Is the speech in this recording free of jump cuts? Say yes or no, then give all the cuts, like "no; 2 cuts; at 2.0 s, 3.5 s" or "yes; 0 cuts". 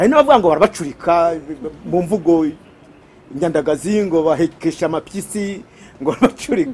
yes; 0 cuts